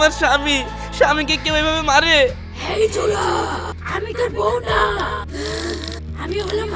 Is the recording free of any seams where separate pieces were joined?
yes; 0 cuts

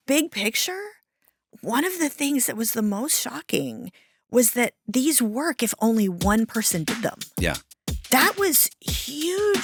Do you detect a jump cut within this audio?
no; 0 cuts

